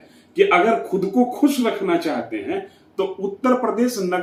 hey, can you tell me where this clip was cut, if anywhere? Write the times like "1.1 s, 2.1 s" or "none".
none